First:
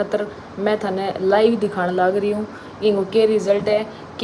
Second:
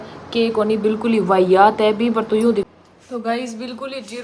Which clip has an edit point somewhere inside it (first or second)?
second